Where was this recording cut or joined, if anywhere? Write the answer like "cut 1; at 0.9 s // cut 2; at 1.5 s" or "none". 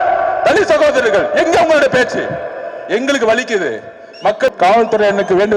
cut 1; at 4.5 s